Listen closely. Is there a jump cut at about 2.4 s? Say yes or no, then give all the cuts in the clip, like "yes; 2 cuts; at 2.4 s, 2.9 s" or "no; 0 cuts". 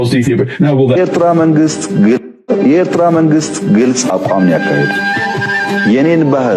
no; 1 cut; at 1.0 s